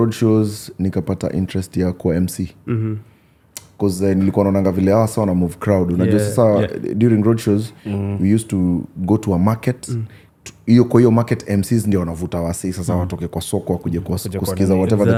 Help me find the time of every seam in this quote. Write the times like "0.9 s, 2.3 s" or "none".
none